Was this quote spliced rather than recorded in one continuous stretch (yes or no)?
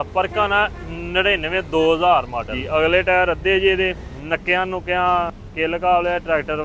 yes